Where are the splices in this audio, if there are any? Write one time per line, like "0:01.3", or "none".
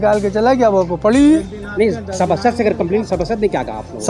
none